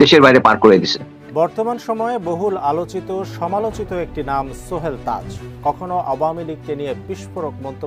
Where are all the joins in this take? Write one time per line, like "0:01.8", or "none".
0:01.1